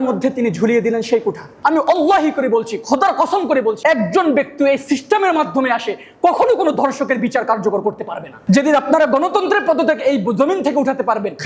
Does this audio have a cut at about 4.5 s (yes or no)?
no